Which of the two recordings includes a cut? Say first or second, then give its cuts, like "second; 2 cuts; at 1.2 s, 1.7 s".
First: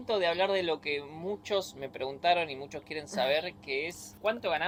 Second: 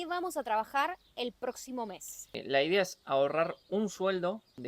second; 1 cut; at 2.3 s